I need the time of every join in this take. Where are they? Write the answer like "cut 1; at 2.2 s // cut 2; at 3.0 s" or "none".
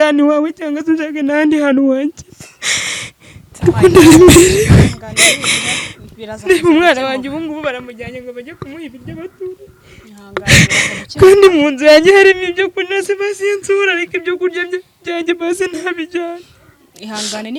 none